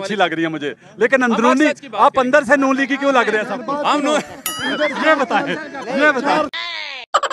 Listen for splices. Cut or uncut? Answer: uncut